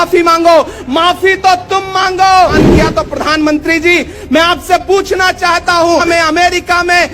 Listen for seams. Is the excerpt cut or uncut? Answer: cut